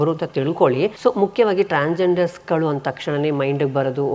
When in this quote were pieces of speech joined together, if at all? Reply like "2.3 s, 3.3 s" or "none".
1.0 s